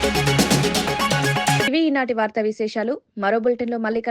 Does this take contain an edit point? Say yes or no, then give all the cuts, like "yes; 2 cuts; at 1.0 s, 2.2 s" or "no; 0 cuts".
no; 0 cuts